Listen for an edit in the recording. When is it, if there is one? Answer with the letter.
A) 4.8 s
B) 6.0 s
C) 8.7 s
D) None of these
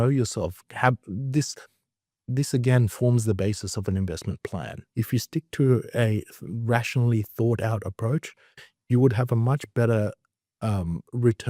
A